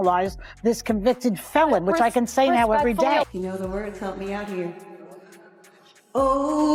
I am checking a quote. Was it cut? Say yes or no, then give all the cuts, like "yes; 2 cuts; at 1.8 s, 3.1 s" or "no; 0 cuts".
no; 0 cuts